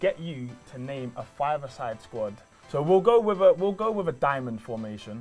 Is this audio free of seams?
no; 1 cut; at 2.5 s

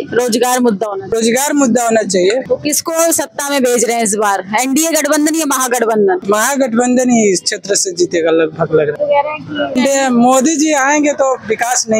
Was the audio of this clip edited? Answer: yes; 4 cuts; at 1.0 s, 2.4 s, 6.2 s, 9.5 s

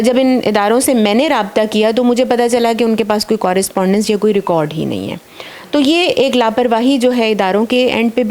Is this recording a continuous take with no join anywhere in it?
yes; 0 cuts

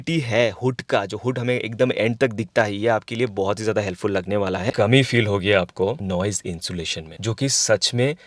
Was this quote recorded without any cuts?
no; 1 cut; at 4.7 s

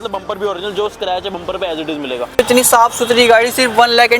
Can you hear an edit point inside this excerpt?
yes; 1 cut; at 2.4 s

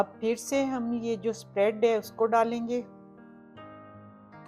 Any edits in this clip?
yes; 1 cut; at 3.0 s

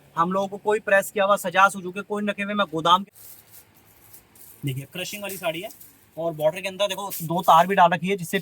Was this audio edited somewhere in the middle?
yes; 1 cut; at 3.0 s

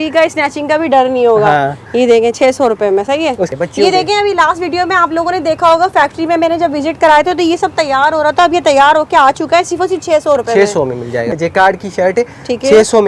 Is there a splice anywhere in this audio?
yes; 2 cuts; at 3.5 s, 11.3 s

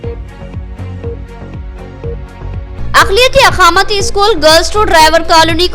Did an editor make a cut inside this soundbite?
yes; 1 cut; at 1.2 s

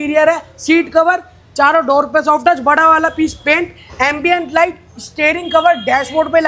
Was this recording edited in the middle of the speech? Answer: no; 0 cuts

